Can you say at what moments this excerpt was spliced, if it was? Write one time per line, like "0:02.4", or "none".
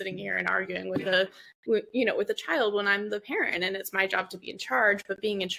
none